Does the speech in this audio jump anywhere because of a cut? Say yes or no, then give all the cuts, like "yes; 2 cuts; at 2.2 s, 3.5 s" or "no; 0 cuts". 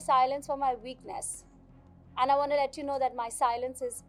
no; 0 cuts